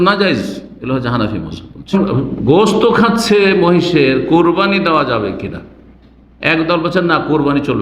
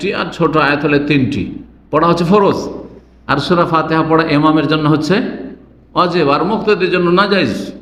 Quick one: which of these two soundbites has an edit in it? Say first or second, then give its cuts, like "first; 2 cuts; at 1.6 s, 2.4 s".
first; 1 cut; at 1.9 s